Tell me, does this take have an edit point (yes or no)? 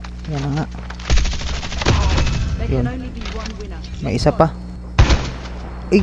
yes